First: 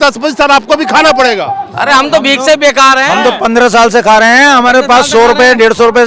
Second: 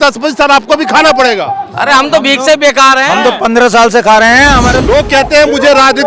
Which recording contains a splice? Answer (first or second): second